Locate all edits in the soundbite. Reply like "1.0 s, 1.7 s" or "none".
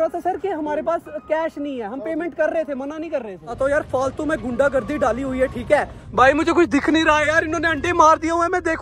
3.5 s, 6.0 s